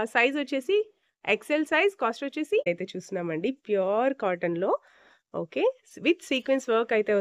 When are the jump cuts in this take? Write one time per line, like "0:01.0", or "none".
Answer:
0:02.7

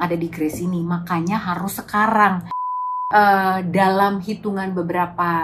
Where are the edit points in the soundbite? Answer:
0:02.8

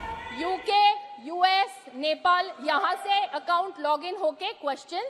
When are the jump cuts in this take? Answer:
none

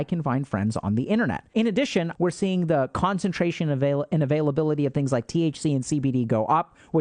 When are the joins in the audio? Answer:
0:01.8

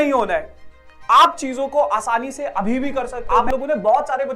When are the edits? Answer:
0:03.3

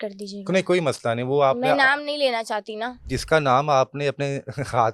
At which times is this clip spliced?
0:03.1

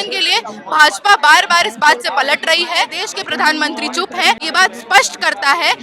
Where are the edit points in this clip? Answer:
0:03.0
0:04.4

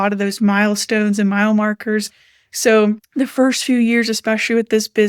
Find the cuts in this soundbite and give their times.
none

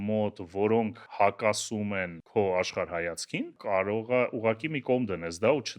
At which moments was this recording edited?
0:01.0
0:02.2
0:03.6

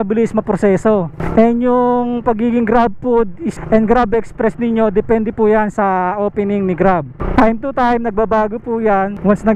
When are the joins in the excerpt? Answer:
none

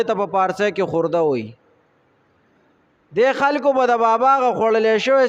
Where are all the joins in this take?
none

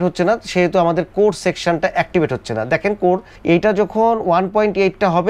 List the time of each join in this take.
0:03.3

